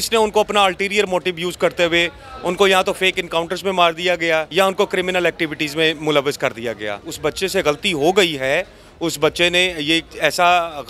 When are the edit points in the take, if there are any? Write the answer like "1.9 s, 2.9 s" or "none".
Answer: 4.5 s, 7.1 s